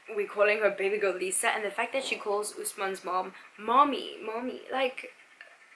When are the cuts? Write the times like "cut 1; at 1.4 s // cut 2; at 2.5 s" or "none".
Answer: none